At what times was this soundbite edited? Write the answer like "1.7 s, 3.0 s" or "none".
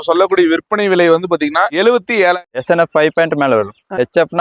2.4 s